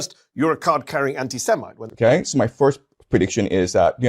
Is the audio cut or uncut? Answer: cut